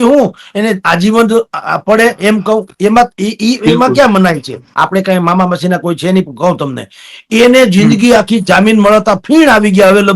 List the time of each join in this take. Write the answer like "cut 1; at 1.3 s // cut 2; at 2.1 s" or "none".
cut 1; at 4.6 s